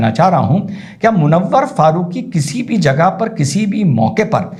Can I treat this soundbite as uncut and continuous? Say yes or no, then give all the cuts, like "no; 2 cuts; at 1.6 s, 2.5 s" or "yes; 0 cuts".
yes; 0 cuts